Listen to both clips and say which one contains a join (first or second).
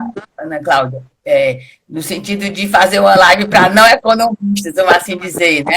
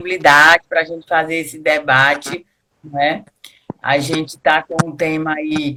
first